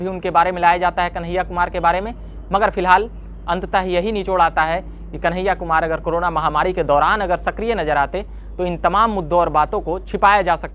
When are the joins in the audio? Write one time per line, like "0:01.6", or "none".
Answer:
none